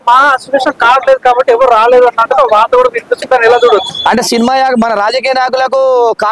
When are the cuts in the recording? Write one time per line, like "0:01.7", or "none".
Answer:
none